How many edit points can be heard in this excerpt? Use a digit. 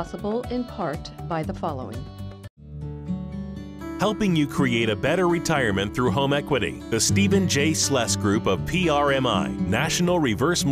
0